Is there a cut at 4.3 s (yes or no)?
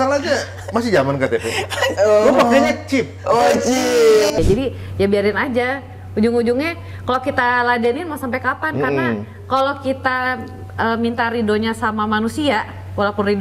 yes